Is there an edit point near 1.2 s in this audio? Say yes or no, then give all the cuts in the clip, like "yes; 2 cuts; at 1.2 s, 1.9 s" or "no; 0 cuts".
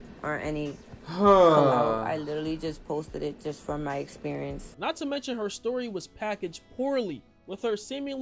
no; 1 cut; at 4.7 s